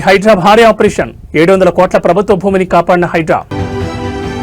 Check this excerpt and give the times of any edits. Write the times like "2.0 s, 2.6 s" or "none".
none